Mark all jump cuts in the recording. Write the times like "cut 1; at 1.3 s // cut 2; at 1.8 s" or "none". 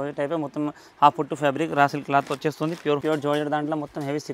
cut 1; at 3.0 s